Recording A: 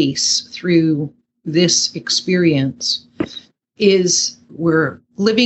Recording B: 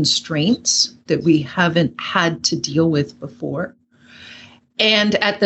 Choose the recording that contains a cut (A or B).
A